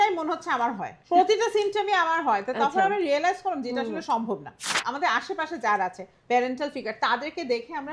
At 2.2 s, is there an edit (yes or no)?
no